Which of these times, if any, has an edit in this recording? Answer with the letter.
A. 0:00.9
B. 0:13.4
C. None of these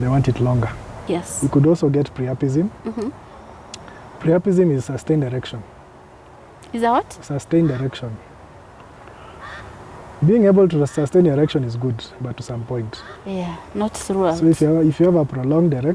A